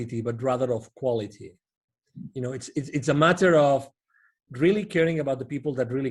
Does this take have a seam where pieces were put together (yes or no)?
no